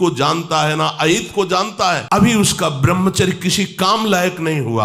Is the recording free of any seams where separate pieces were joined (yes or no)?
no